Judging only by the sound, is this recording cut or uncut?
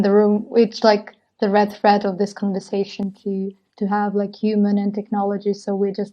cut